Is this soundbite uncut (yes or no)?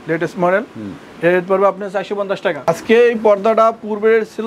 no